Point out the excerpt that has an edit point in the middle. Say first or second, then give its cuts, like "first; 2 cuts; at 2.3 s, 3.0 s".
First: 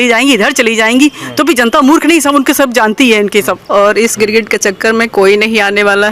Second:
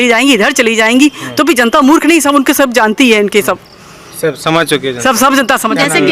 first; 1 cut; at 3.7 s